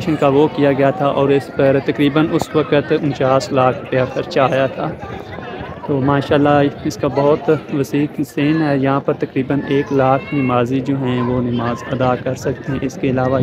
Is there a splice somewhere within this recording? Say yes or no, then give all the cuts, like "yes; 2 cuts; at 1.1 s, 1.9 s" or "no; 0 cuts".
no; 0 cuts